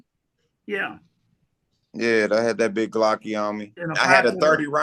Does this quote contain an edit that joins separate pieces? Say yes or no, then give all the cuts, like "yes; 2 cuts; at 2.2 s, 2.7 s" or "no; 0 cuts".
yes; 1 cut; at 3.8 s